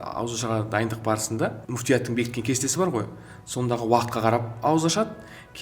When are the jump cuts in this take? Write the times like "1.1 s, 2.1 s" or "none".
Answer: 1.7 s